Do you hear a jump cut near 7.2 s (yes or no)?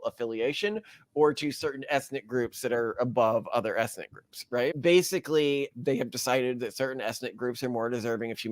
no